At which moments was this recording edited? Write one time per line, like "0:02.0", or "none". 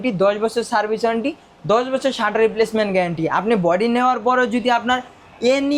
none